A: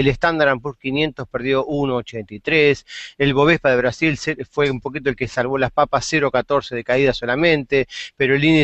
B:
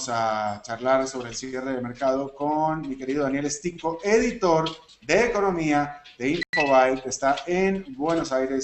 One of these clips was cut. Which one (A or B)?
A